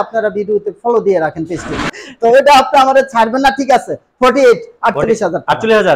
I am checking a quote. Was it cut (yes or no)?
yes